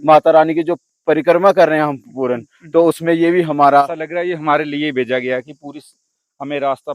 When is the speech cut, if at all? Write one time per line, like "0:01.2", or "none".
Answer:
0:03.8